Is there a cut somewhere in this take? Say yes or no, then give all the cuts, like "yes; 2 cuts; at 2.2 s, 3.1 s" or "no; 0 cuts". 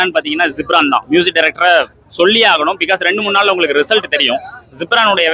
no; 0 cuts